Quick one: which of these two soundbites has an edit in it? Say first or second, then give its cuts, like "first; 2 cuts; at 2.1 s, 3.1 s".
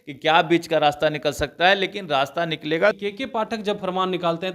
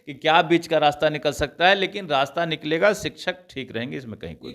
first; 1 cut; at 3.0 s